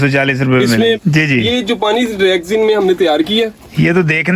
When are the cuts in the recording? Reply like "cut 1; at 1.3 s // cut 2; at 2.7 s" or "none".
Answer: cut 1; at 1.0 s